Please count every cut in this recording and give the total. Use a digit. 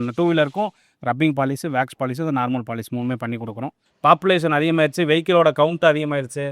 1